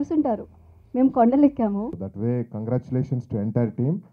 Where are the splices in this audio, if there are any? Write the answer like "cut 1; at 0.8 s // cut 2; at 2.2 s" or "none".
cut 1; at 2.0 s